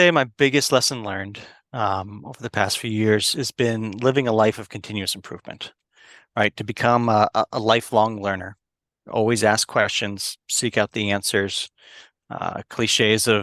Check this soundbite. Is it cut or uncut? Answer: uncut